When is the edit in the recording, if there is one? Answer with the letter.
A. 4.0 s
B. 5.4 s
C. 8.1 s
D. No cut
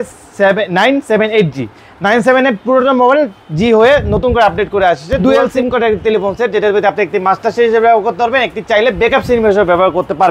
B